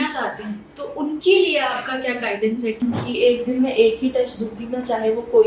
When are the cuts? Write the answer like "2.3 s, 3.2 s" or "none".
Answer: 2.8 s